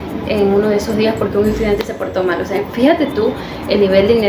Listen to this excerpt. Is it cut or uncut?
uncut